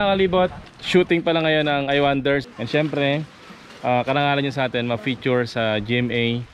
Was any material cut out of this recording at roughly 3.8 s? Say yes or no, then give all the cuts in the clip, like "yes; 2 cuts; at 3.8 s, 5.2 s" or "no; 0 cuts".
no; 1 cut; at 2.4 s